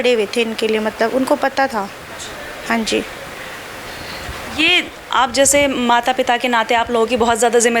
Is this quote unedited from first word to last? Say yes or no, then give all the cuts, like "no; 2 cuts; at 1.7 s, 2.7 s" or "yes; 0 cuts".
yes; 0 cuts